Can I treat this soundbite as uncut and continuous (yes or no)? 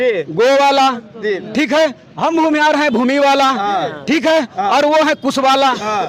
yes